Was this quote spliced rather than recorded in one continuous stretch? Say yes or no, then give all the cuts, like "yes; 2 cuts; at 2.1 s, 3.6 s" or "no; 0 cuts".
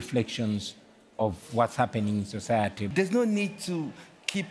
yes; 1 cut; at 2.9 s